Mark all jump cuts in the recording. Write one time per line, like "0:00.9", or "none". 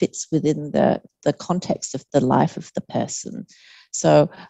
none